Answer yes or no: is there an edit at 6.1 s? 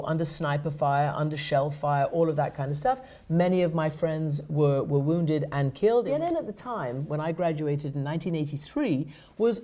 yes